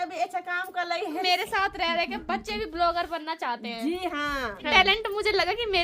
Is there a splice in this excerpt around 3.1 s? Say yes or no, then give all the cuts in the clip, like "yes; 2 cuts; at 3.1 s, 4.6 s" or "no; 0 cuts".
no; 2 cuts; at 1.2 s, 4.7 s